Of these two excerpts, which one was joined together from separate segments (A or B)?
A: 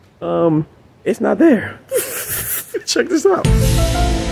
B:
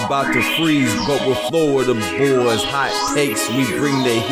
A